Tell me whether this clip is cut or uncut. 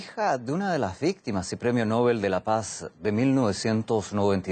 uncut